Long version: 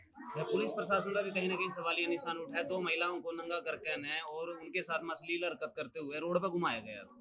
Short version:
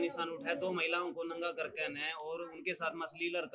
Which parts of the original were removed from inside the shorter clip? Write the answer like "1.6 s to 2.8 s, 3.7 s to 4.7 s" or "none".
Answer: none